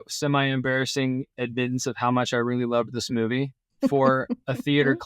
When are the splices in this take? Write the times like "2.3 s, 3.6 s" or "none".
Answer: 1.3 s, 3.9 s